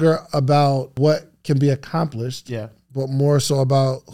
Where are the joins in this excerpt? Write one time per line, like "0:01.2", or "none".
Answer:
0:00.9

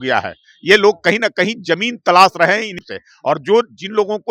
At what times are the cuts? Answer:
0:02.8

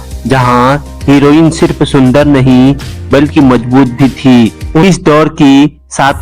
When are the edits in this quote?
0:04.8

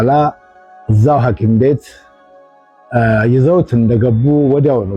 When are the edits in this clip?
none

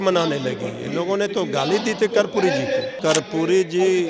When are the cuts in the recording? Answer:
0:03.0

